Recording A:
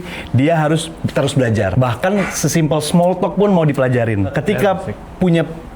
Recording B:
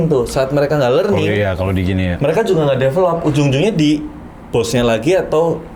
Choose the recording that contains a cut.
A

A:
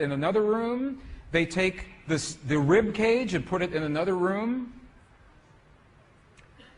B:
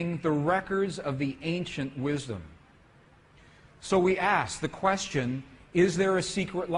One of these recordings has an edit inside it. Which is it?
A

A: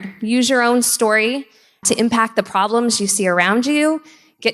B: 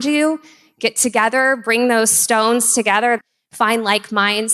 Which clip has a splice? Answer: B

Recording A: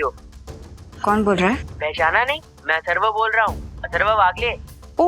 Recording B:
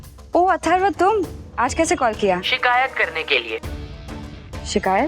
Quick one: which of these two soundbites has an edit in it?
B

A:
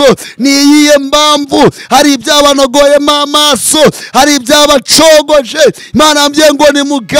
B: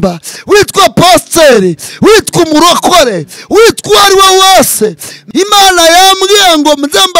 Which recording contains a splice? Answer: B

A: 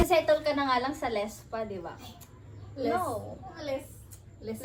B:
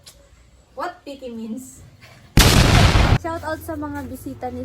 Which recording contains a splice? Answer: B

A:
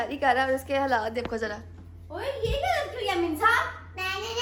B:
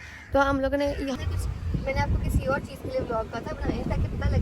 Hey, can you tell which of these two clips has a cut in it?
B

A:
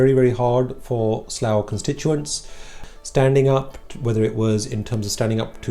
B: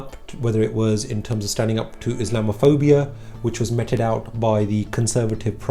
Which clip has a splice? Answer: A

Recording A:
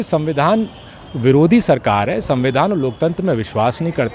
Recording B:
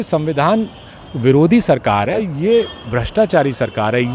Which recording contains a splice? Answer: B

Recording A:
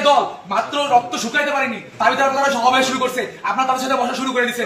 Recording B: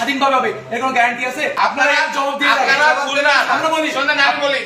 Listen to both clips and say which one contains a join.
B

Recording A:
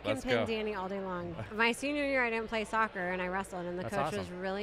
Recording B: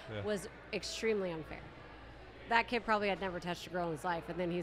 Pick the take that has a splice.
A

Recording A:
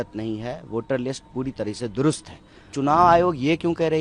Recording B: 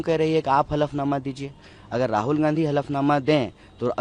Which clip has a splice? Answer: A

